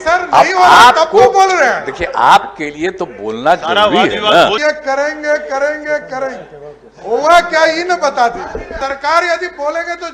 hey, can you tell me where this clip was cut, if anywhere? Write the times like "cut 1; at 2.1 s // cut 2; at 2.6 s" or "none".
cut 1; at 4.6 s // cut 2; at 8.8 s